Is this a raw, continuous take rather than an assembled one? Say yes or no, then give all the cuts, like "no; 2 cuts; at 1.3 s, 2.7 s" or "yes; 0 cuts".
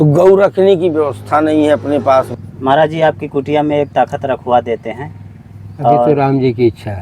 no; 1 cut; at 2.4 s